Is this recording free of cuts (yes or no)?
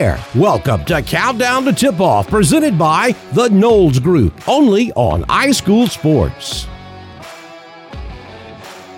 no